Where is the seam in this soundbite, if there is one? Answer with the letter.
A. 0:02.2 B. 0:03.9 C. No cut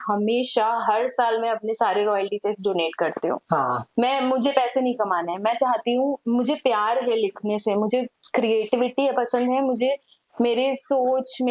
C